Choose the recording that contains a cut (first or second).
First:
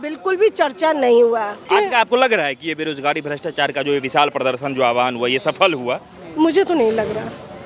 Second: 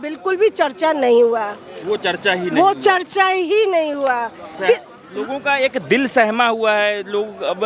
first